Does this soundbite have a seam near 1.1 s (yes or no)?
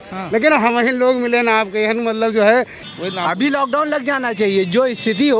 no